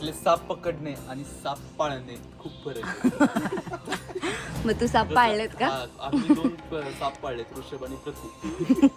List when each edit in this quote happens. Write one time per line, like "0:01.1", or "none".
none